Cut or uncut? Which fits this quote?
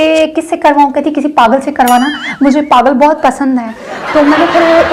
uncut